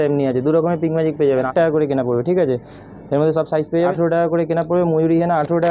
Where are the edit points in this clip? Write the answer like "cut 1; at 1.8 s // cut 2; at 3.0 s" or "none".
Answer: cut 1; at 1.5 s // cut 2; at 3.9 s